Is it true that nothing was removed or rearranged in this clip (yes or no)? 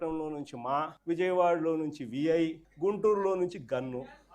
no